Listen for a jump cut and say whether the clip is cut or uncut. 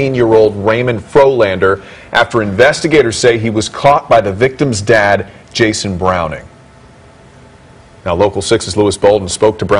cut